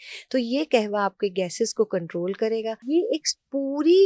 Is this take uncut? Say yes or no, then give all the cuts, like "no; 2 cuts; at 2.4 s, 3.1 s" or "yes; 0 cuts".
no; 1 cut; at 2.8 s